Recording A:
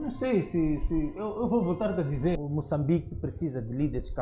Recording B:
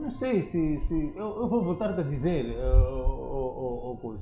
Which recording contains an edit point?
A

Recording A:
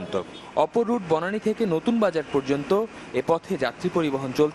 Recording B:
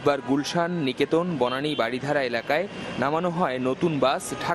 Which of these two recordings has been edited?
B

